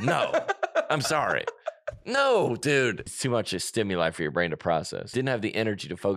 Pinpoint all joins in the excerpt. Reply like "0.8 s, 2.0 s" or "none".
3.1 s, 5.1 s